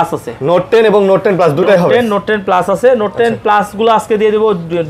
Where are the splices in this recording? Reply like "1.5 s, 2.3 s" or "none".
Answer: none